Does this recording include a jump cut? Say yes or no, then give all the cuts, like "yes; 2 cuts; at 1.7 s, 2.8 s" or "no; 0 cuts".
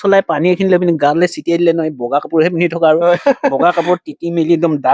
no; 0 cuts